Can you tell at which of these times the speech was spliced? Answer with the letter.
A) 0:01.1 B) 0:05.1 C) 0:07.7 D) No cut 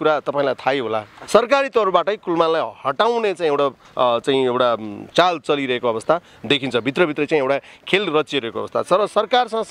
A